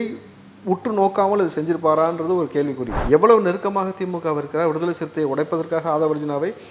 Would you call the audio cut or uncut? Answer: cut